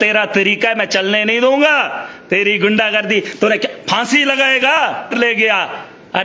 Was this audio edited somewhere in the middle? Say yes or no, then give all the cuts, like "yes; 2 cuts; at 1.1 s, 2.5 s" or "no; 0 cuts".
yes; 1 cut; at 5.1 s